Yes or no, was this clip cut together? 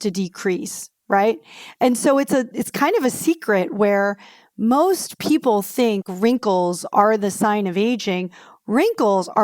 no